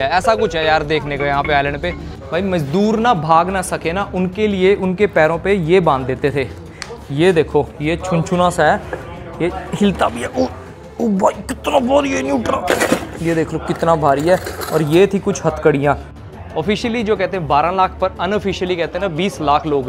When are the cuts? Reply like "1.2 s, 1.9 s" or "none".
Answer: 2.1 s, 16.1 s